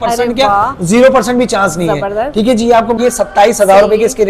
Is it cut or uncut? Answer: cut